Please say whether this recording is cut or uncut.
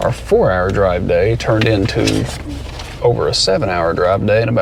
uncut